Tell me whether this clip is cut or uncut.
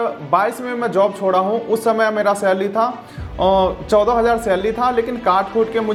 uncut